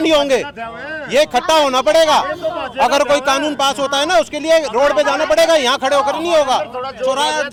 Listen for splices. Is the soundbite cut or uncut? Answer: uncut